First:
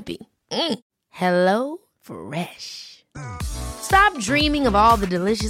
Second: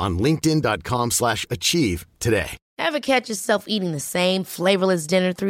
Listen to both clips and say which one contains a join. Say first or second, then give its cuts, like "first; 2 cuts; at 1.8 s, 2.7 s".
second; 1 cut; at 2.6 s